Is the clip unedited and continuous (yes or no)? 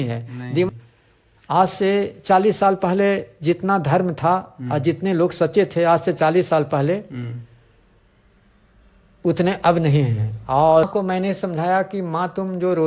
no